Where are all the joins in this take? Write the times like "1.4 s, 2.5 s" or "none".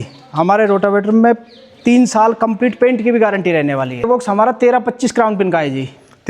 4.0 s